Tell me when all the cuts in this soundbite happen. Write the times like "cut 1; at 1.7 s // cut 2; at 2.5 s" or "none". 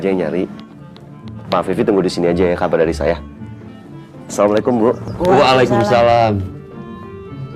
cut 1; at 6.4 s